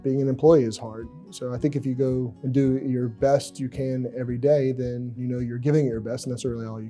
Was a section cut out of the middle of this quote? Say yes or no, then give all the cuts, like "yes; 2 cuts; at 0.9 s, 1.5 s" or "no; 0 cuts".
yes; 2 cuts; at 2.4 s, 5.1 s